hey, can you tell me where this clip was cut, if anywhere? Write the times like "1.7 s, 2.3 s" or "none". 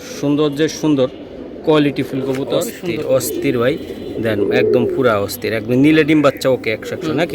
2.7 s